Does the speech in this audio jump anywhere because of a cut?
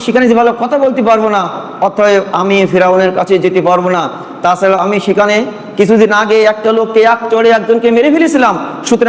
no; 0 cuts

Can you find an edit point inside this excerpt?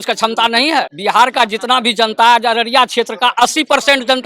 yes; 1 cut; at 0.9 s

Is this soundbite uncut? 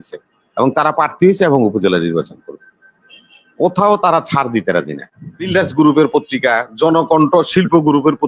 no; 1 cut; at 5.5 s

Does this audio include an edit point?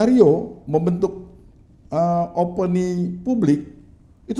no; 0 cuts

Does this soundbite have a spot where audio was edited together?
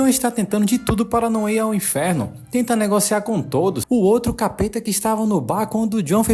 yes; 1 cut; at 3.8 s

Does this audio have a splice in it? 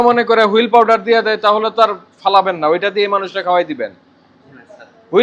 no; 0 cuts

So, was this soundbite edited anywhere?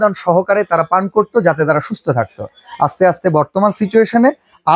no; 0 cuts

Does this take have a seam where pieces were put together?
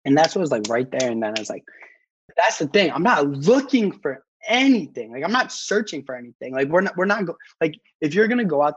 yes; 1 cut; at 1.8 s

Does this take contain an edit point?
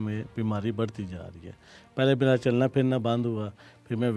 no; 0 cuts

